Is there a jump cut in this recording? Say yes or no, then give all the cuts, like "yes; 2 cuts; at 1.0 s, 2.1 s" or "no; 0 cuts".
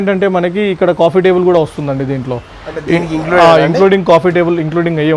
no; 0 cuts